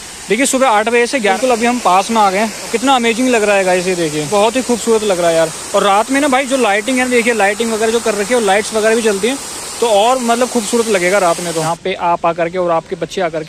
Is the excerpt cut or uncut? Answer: cut